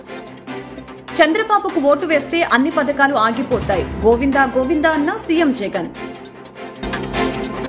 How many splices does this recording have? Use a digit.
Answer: 1